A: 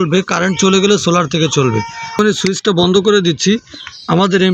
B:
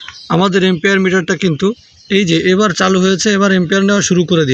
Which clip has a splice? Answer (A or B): A